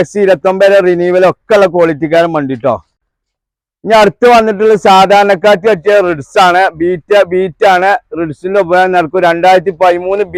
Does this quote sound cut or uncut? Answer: uncut